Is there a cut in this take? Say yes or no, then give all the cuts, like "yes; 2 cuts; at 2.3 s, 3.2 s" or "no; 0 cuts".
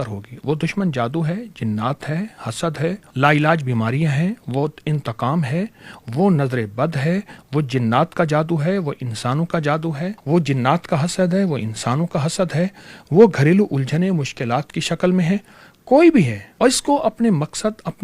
yes; 3 cuts; at 3.1 s, 10.2 s, 16.4 s